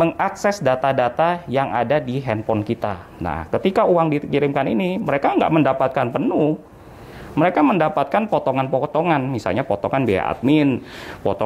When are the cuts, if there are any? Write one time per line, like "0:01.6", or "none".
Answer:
0:03.1